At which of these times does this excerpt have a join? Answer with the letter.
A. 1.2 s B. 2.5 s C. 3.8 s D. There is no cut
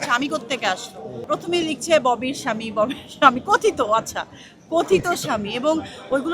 A